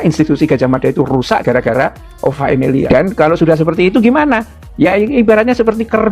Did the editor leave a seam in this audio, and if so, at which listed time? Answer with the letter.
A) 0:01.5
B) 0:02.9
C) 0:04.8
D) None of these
B